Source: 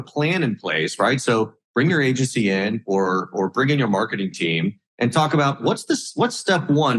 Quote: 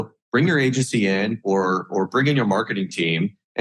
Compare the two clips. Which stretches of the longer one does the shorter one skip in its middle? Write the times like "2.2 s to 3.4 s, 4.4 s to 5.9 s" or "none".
none